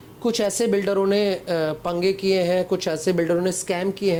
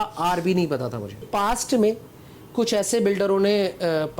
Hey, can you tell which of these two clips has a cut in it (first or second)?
second